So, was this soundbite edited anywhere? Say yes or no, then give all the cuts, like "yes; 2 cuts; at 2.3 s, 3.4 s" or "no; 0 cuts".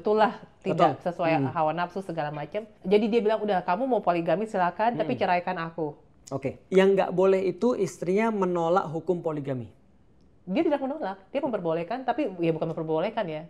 yes; 2 cuts; at 2.7 s, 6.6 s